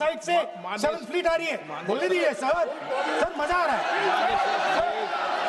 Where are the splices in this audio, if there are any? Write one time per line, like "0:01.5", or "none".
none